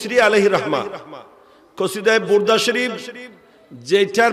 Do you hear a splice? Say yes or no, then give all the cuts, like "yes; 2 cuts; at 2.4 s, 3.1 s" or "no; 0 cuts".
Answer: no; 0 cuts